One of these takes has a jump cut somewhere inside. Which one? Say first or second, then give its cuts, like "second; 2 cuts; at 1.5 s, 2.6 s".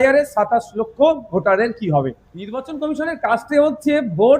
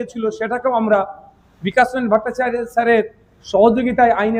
first; 1 cut; at 2.6 s